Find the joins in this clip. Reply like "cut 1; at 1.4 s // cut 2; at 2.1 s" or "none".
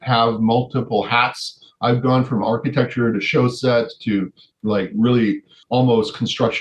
cut 1; at 4.4 s // cut 2; at 5.5 s